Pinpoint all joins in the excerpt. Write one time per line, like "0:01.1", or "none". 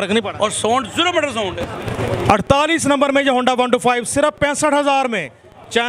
0:01.9